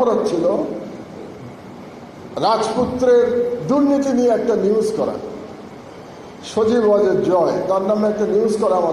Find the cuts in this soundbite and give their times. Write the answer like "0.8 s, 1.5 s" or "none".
none